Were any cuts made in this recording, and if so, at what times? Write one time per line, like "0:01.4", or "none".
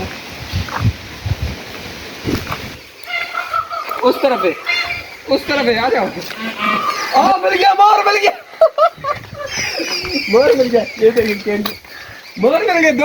0:02.2
0:07.0